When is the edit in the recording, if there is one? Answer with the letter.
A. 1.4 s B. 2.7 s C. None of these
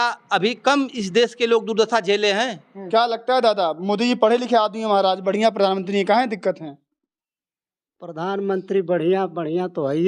B